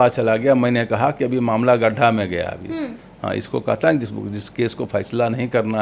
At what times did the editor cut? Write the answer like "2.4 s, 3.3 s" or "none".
none